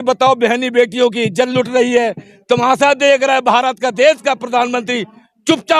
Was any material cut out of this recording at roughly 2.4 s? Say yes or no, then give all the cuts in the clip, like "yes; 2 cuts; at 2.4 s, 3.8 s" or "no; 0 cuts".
no; 0 cuts